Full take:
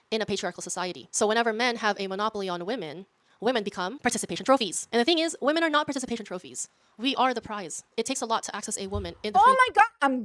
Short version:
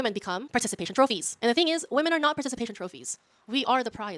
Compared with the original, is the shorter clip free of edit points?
yes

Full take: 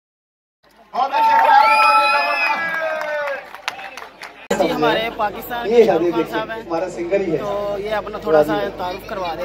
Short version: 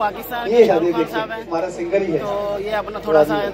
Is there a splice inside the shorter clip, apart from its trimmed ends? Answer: no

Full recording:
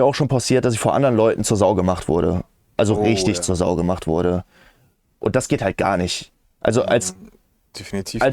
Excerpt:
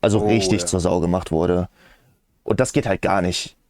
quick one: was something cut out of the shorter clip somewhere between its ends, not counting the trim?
no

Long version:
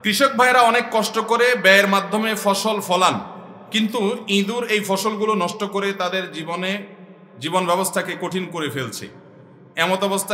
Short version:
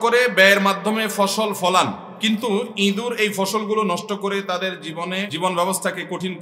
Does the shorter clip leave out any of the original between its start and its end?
yes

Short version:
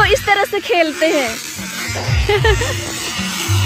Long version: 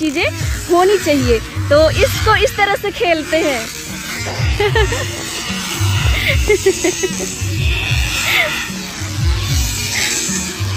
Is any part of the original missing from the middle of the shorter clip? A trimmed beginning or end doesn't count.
no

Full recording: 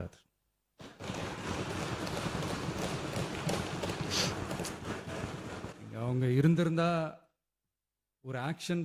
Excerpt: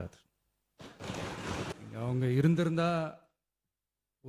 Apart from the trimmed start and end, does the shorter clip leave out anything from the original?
yes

